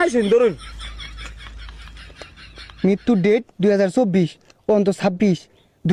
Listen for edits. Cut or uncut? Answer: uncut